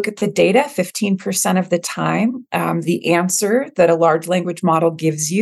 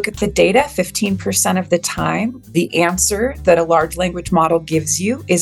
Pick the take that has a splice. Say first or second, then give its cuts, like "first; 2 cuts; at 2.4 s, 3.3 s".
second; 1 cut; at 2.5 s